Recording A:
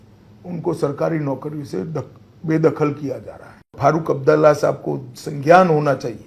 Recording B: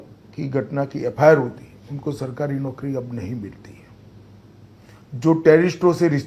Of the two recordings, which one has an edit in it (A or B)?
A